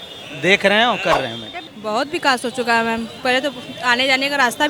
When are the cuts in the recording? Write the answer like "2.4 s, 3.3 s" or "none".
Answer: 1.5 s